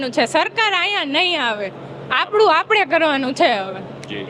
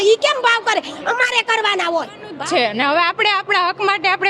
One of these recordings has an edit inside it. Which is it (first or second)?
second